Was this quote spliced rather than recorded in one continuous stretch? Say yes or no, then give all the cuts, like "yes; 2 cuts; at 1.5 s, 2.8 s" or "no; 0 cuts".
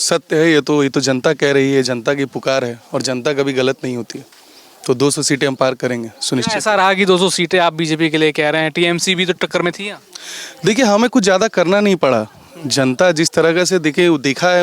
no; 0 cuts